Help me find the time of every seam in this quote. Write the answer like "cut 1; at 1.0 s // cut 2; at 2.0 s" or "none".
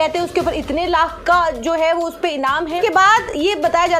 cut 1; at 2.8 s